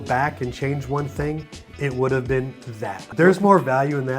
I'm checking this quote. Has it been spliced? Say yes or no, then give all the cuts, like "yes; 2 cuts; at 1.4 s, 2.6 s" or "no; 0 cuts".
yes; 1 cut; at 3.0 s